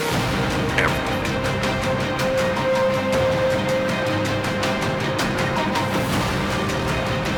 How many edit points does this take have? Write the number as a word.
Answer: zero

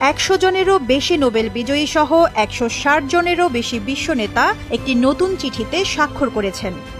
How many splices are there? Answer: zero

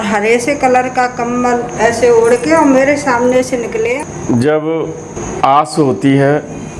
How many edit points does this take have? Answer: two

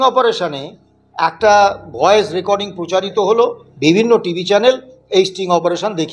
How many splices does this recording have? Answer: one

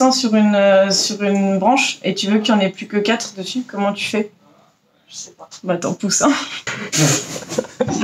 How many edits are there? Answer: one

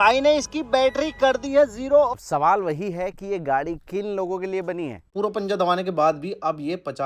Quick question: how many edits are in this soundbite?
two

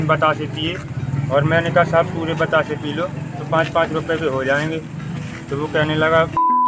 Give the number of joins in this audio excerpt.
zero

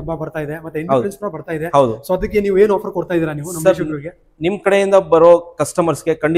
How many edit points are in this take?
zero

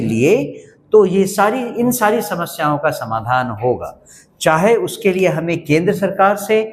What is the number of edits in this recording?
zero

